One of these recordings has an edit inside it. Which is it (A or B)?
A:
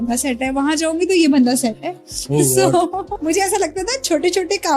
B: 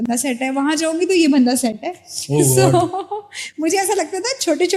A